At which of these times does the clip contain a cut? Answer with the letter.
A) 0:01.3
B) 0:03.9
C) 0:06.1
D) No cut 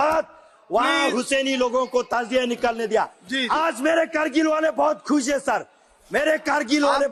D